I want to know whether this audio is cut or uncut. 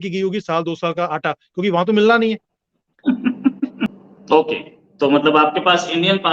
cut